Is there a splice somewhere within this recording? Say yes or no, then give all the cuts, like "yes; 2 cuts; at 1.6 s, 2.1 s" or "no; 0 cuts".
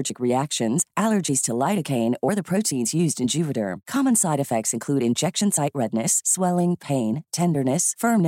no; 0 cuts